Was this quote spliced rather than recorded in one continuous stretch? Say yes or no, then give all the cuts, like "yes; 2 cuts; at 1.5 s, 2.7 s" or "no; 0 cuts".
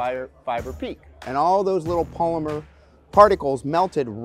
yes; 1 cut; at 1.0 s